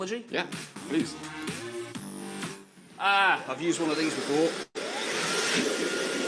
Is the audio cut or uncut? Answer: cut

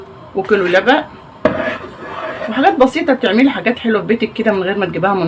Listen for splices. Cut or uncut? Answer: uncut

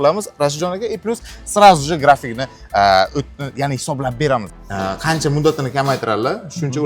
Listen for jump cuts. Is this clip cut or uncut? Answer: cut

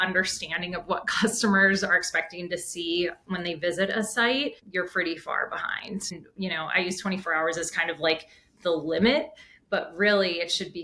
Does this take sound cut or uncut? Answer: cut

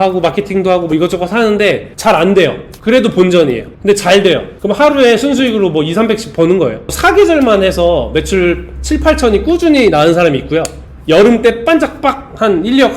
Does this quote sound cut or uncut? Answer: cut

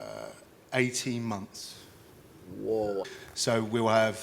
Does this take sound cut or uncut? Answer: cut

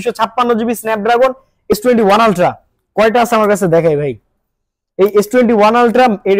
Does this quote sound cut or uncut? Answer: cut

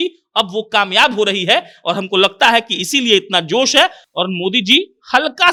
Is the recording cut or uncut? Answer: uncut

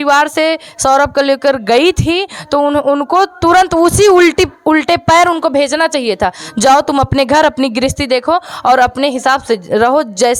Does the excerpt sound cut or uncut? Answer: uncut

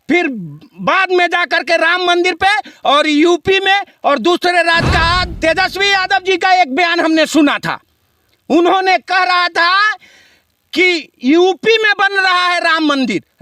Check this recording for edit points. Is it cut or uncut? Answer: cut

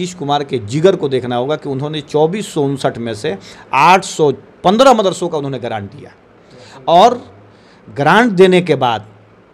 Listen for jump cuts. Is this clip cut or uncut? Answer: uncut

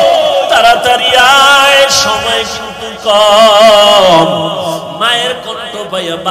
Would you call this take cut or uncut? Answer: uncut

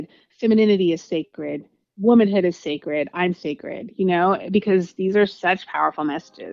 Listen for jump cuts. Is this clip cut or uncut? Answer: uncut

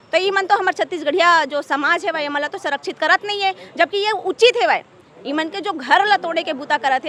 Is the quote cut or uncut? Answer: uncut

